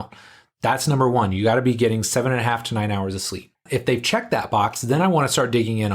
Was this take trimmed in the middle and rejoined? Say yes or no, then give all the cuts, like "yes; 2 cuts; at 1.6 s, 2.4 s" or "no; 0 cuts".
yes; 1 cut; at 3.6 s